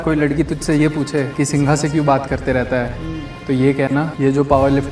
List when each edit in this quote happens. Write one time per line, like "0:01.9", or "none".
0:01.3
0:04.1